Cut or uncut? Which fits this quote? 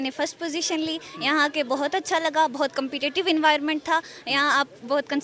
uncut